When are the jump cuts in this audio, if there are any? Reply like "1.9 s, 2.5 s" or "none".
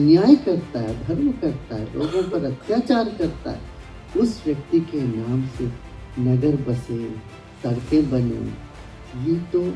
none